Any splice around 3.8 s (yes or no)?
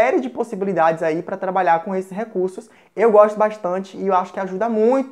no